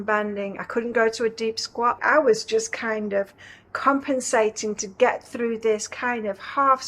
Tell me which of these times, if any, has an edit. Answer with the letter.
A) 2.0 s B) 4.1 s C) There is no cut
A